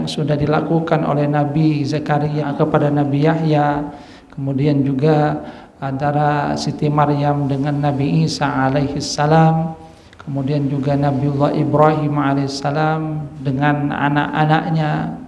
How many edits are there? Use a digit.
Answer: 1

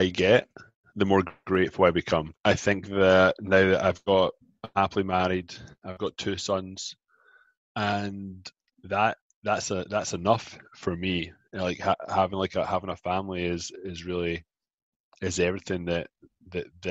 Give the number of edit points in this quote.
1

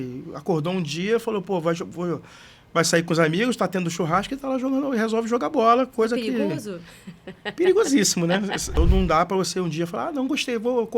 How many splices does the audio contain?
1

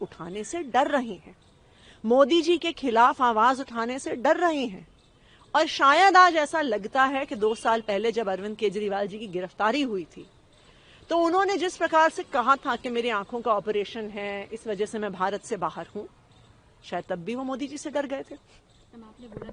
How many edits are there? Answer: 0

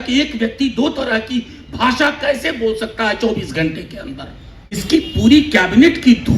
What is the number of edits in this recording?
1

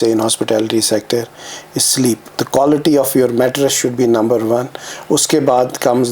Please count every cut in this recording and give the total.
1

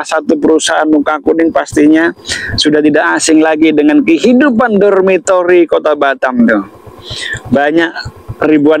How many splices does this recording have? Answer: 0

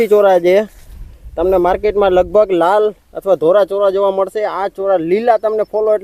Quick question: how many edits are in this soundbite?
0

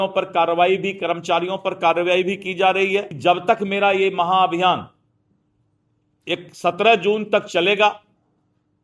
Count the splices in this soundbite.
1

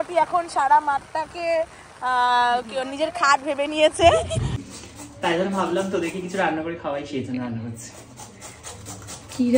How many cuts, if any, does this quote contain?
1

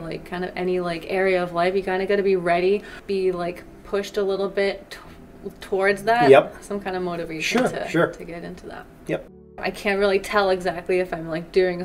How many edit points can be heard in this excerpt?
2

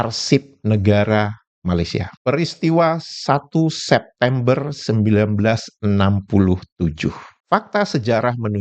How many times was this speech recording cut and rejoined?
2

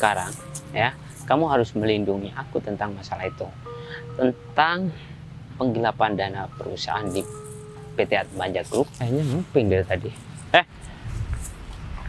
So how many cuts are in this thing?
1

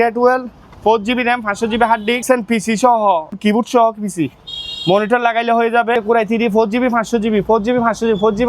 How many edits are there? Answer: 3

